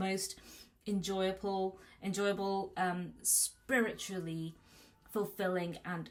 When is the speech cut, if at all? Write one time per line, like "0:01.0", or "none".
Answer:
none